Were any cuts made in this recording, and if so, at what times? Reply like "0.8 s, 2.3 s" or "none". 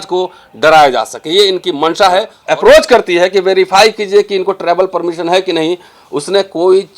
2.4 s